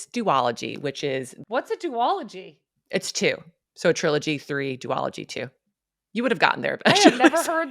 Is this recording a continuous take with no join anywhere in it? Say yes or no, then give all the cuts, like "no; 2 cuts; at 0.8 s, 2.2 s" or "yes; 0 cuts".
no; 1 cut; at 1.4 s